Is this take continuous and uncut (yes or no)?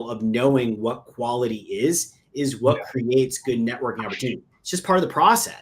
no